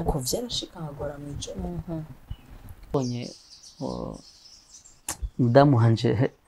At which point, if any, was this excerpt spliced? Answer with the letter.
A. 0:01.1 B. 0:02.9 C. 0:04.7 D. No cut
B